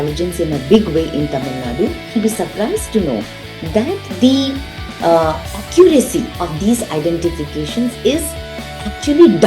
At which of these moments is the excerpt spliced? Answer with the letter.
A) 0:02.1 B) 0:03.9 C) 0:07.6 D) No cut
A